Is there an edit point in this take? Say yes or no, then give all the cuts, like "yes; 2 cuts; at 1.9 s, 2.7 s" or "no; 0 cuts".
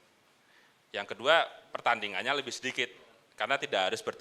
no; 0 cuts